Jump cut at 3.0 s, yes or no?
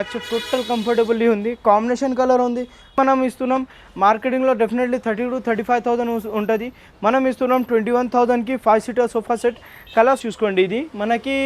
yes